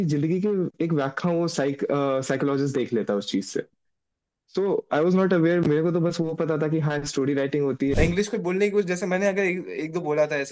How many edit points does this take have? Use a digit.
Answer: 1